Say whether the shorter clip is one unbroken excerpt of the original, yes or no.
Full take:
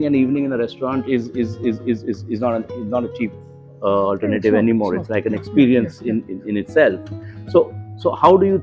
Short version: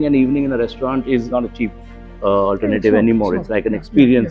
no